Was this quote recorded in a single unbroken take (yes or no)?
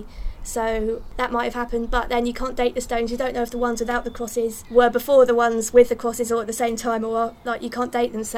no